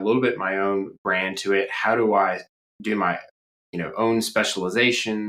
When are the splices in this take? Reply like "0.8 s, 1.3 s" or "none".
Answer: none